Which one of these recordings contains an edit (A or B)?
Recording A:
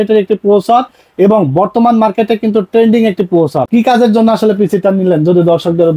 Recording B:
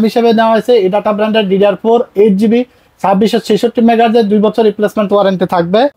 A